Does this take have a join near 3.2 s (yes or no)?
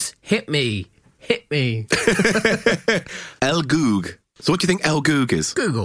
yes